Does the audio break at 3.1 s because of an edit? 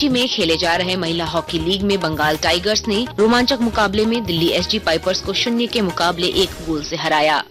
yes; 1 cut; at 3.1 s

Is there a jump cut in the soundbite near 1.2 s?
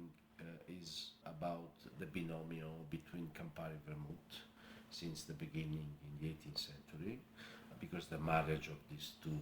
yes; 3 cuts; at 1.2 s, 1.9 s, 7.7 s

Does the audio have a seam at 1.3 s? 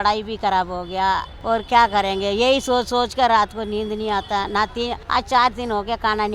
yes; 2 cuts; at 1.3 s, 5.0 s

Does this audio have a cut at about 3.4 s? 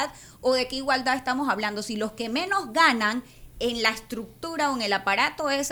no; 0 cuts

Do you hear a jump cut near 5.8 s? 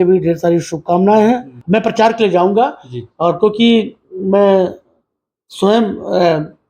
no; 1 cut; at 1.5 s

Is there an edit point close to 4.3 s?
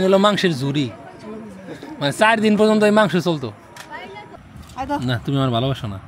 yes; 1 cut; at 4.3 s

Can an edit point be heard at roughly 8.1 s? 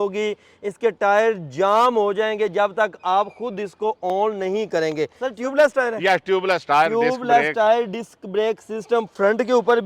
no; 1 cut; at 5.2 s

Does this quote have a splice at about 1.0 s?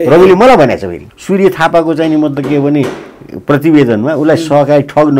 yes; 1 cut; at 1.0 s

